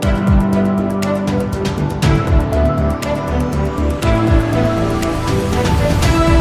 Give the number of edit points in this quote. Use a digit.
0